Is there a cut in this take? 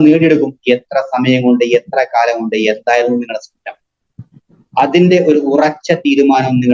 no; 0 cuts

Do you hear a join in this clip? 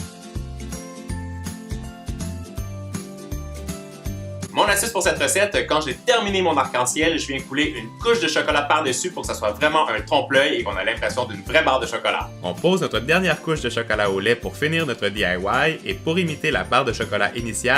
no; 0 cuts

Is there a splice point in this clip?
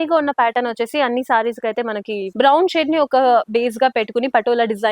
yes; 1 cut; at 2.3 s

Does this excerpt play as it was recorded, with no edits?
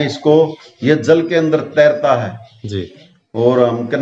yes; 0 cuts

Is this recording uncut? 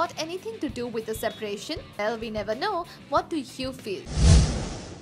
no; 1 cut; at 4.0 s

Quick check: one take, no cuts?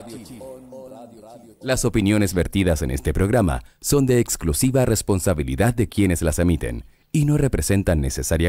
no; 1 cut; at 1.5 s

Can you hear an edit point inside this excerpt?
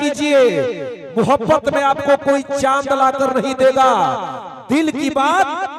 no; 0 cuts

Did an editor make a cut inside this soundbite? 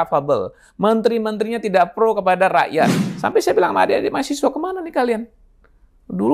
yes; 1 cut; at 3.1 s

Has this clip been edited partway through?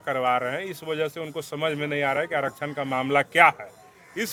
no; 0 cuts

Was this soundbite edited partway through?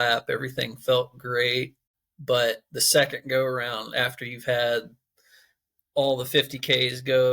yes; 1 cut; at 1.8 s

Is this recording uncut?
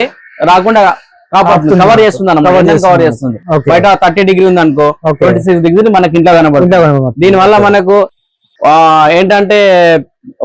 yes; 0 cuts

